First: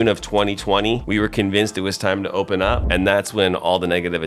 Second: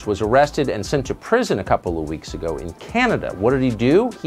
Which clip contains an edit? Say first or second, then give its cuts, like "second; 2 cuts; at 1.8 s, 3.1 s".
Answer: first; 1 cut; at 2.8 s